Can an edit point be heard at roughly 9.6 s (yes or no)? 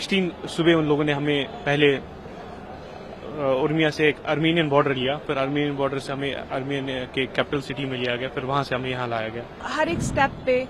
yes